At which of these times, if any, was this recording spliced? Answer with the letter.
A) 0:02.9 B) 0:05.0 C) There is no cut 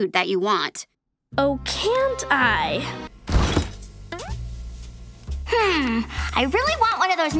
A